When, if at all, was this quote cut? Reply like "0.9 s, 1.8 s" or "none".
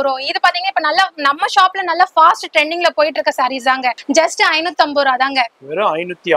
4.0 s